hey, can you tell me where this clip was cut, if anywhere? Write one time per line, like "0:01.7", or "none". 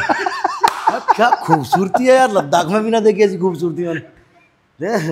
none